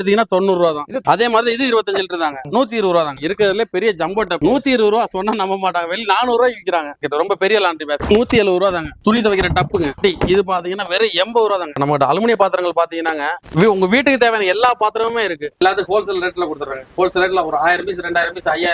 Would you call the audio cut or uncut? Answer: cut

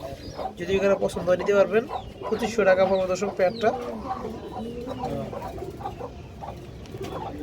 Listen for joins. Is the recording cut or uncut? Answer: uncut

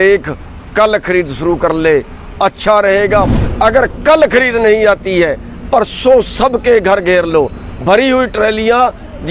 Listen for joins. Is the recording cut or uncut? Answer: cut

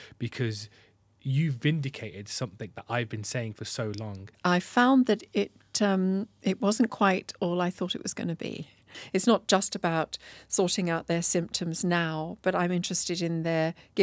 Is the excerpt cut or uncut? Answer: cut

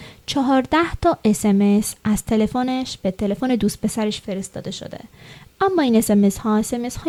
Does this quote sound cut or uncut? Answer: uncut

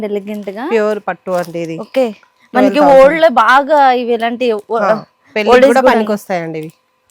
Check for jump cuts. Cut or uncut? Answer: uncut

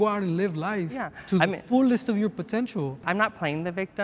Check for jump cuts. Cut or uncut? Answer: cut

